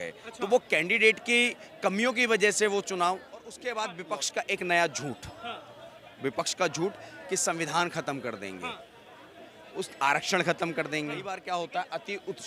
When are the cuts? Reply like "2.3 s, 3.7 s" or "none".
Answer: 3.6 s, 11.3 s